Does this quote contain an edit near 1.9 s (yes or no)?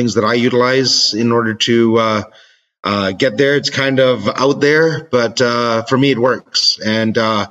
no